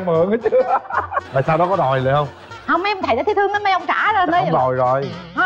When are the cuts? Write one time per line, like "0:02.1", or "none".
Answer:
0:01.2